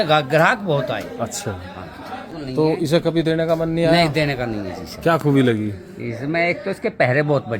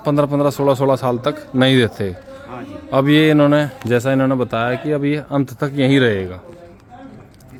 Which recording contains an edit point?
first; 1 cut; at 2.3 s

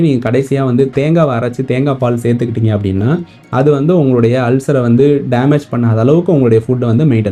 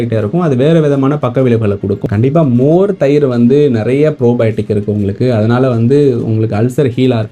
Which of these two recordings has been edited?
second; 1 cut; at 2.0 s

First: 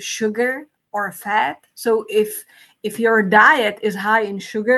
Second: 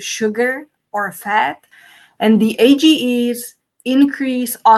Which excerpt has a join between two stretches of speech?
second; 1 cut; at 1.7 s

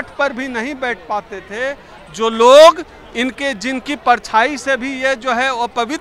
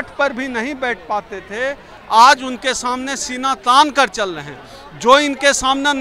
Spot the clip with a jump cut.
second; 1 cut; at 1.9 s

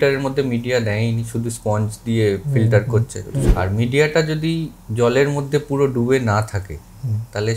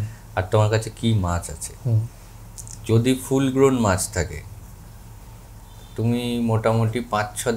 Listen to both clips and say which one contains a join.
first; 1 cut; at 3.5 s

